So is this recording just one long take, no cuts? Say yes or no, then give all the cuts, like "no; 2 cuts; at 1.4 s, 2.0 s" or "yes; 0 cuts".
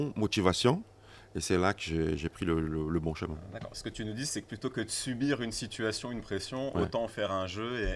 yes; 0 cuts